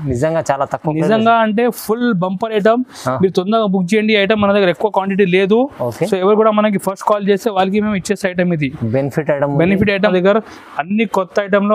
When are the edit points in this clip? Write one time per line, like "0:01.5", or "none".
0:10.1